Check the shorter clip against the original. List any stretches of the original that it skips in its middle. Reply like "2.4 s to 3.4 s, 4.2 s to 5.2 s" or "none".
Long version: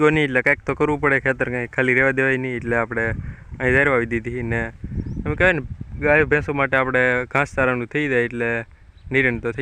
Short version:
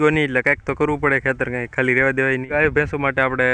2.5 s to 6.0 s